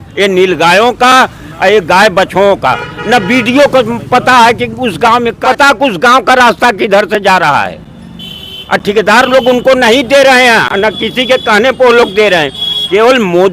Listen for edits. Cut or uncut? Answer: cut